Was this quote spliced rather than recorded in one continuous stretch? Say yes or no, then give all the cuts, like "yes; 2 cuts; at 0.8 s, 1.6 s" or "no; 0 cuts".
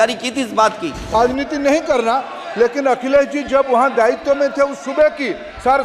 yes; 1 cut; at 1.1 s